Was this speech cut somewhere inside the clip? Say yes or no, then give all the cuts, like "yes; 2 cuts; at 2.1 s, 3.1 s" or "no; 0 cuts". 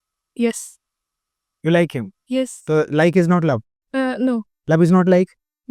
no; 0 cuts